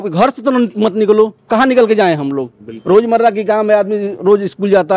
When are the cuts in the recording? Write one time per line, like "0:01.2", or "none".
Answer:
none